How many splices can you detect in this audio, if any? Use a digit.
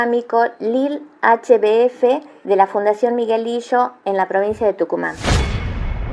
1